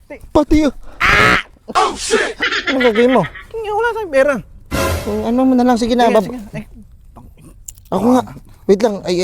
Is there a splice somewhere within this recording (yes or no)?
yes